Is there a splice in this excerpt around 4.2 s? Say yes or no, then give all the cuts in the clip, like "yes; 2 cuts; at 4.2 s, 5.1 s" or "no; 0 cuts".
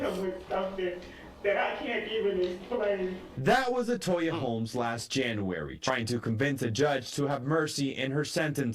yes; 1 cut; at 4.2 s